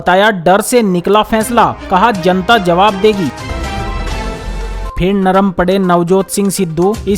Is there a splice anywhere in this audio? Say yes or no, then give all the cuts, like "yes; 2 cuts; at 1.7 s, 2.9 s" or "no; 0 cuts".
yes; 1 cut; at 3.4 s